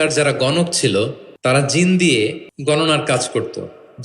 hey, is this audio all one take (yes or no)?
no